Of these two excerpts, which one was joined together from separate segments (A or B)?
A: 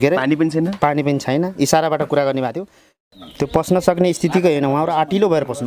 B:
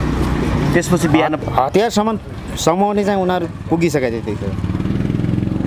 A